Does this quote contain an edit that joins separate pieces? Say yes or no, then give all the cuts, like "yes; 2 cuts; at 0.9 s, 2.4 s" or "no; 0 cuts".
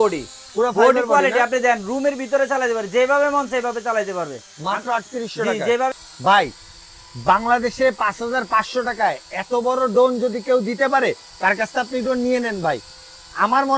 yes; 1 cut; at 5.9 s